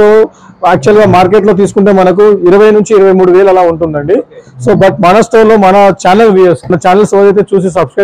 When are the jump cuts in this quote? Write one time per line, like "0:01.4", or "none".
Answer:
0:06.7